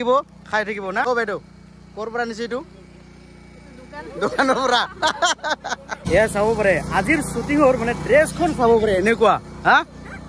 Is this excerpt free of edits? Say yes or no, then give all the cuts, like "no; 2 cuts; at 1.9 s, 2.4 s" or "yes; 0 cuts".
no; 2 cuts; at 1.0 s, 6.0 s